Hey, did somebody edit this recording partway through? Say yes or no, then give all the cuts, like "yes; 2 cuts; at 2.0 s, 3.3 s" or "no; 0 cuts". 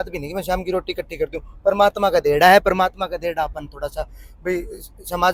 no; 0 cuts